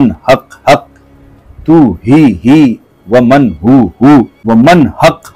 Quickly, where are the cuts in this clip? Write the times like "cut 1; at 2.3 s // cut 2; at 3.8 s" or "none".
cut 1; at 4.4 s